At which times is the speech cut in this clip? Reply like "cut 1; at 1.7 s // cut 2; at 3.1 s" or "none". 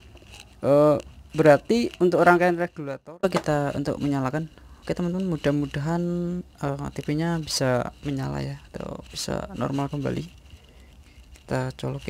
cut 1; at 3.2 s